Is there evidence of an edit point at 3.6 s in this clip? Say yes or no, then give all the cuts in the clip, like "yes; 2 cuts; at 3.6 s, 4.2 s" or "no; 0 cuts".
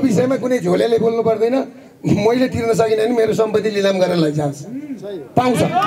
no; 0 cuts